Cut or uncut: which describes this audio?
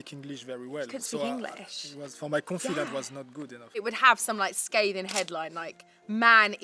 cut